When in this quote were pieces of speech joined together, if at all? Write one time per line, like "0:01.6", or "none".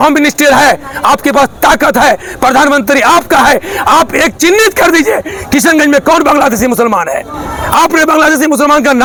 none